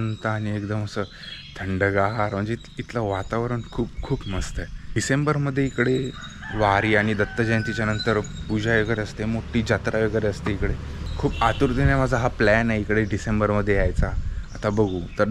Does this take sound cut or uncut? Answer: uncut